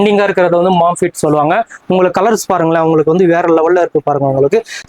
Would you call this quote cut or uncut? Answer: uncut